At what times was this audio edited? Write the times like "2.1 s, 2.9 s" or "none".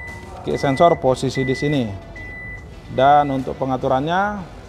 none